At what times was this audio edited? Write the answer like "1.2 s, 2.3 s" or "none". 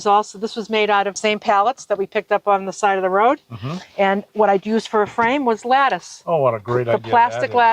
1.1 s